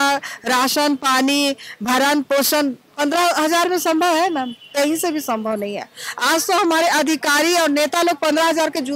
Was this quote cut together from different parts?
no; 0 cuts

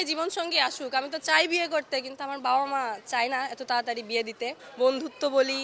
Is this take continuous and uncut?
no; 1 cut; at 4.7 s

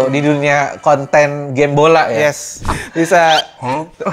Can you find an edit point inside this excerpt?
yes; 1 cut; at 2.6 s

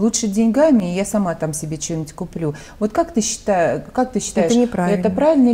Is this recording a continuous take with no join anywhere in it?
yes; 0 cuts

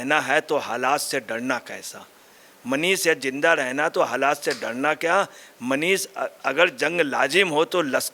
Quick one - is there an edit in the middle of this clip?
no; 0 cuts

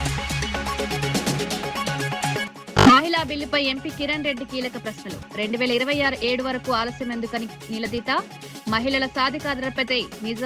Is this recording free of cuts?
no; 1 cut; at 2.5 s

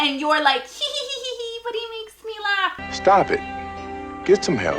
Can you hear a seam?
yes; 1 cut; at 2.8 s

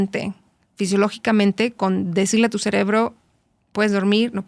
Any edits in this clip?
no; 0 cuts

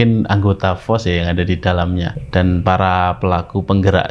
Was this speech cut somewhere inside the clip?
yes; 1 cut; at 2.2 s

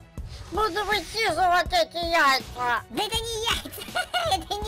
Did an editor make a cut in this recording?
yes; 1 cut; at 2.9 s

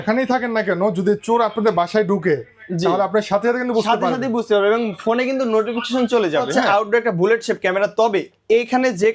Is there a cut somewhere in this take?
yes; 1 cut; at 6.6 s

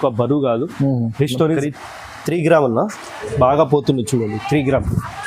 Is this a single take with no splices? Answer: no; 1 cut; at 1.6 s

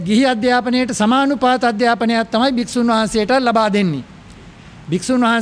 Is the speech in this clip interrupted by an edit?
no; 0 cuts

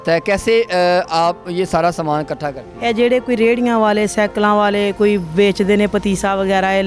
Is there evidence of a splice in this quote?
no; 0 cuts

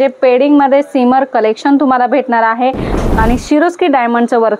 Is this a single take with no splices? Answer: no; 1 cut; at 3.0 s

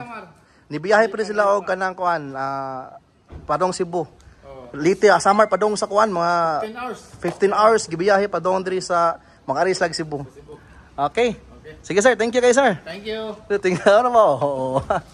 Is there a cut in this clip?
no; 0 cuts

